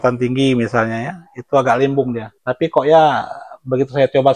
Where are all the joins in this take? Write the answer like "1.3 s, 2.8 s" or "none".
2.3 s